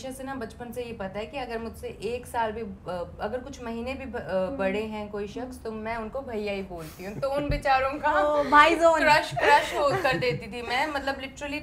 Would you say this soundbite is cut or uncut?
uncut